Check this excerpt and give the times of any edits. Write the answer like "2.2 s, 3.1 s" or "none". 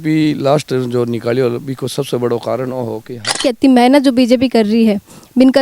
3.4 s